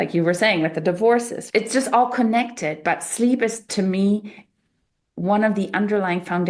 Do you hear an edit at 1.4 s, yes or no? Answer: yes